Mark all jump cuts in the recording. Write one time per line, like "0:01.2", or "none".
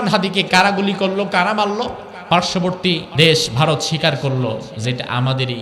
0:02.1
0:03.1

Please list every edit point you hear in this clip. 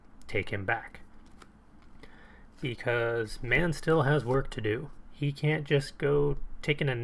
none

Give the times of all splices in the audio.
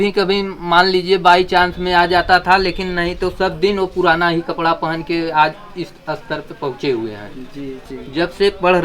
0:07.8

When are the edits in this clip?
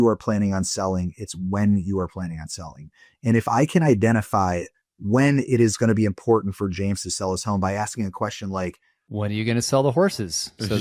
0:09.2

